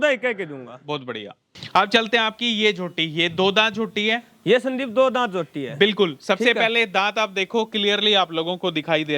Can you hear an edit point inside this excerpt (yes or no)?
yes